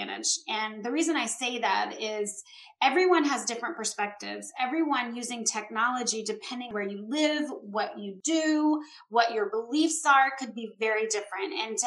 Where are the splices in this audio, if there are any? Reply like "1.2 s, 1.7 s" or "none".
none